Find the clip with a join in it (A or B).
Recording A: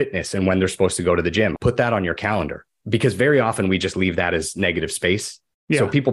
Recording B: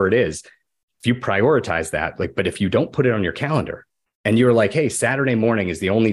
A